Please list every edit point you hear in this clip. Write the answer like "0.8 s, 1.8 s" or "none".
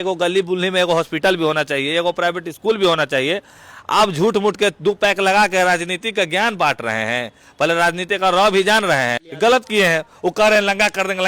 9.2 s